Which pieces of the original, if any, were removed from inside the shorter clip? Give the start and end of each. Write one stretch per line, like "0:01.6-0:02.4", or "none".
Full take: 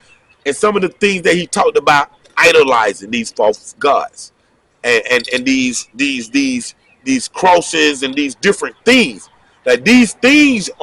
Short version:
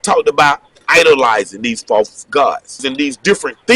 0:04.3-0:08.0